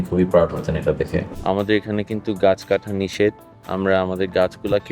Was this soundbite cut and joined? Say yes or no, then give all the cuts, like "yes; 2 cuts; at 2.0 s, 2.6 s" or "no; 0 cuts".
yes; 1 cut; at 1.3 s